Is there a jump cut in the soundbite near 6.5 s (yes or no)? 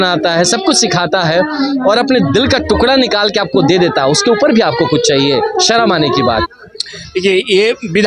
yes